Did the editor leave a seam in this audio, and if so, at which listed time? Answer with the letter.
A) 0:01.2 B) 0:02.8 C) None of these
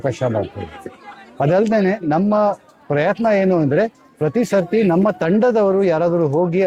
C